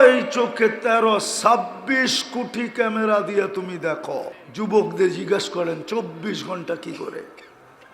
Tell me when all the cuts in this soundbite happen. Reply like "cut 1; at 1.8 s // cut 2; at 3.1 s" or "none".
cut 1; at 4.4 s